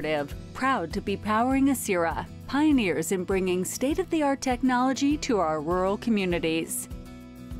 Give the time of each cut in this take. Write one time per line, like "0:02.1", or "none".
0:06.7